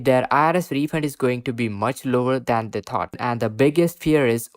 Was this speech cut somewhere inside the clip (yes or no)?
yes